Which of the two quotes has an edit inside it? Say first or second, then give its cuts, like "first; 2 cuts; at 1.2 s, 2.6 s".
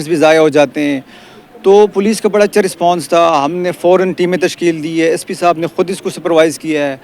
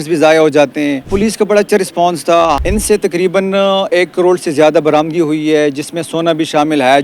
second; 2 cuts; at 1.1 s, 2.6 s